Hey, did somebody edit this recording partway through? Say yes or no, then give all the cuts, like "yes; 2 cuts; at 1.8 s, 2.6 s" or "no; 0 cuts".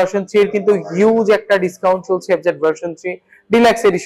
no; 0 cuts